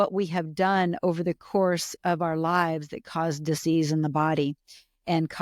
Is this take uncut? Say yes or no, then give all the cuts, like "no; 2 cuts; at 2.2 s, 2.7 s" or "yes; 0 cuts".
yes; 0 cuts